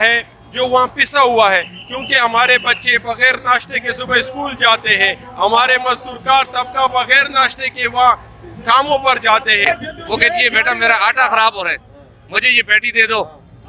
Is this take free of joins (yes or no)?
no